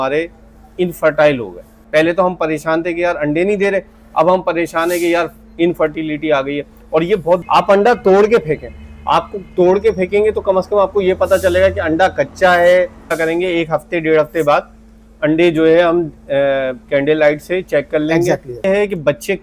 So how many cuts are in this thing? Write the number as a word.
four